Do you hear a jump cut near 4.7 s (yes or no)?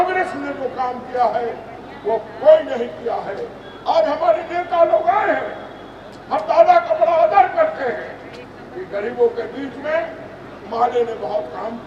no